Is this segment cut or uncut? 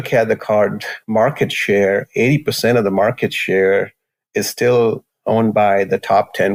uncut